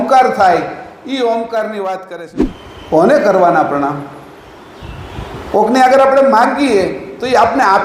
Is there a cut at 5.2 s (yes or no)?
no